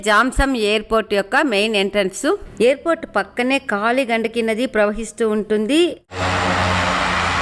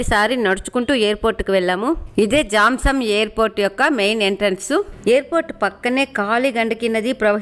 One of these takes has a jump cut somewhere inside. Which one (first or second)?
first